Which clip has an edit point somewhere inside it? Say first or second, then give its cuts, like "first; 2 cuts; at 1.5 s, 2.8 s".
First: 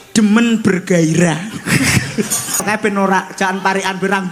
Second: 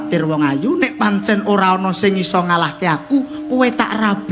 first; 1 cut; at 2.6 s